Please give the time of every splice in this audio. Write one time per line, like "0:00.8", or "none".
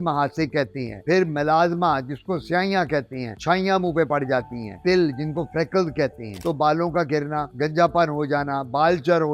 0:04.7
0:06.4